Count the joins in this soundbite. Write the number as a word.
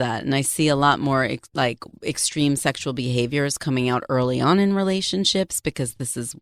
zero